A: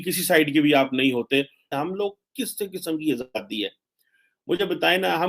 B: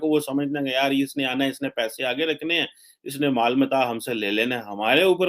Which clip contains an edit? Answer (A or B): A